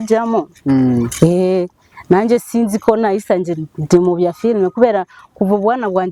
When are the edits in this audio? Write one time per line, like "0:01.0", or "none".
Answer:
none

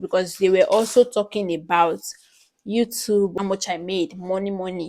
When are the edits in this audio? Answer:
0:03.3

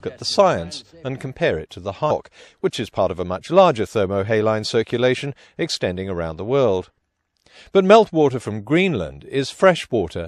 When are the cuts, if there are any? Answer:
none

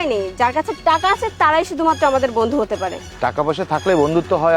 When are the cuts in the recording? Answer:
0:03.0

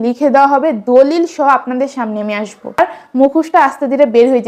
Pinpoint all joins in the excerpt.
0:02.8

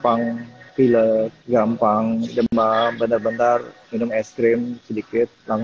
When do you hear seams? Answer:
0:01.4

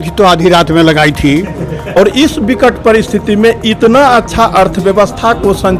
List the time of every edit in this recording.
0:02.0

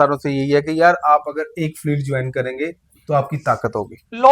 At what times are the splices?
none

